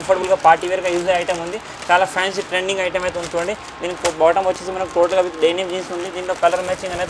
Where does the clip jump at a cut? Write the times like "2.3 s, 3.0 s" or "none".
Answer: none